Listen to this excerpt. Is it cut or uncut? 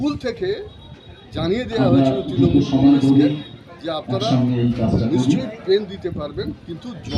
uncut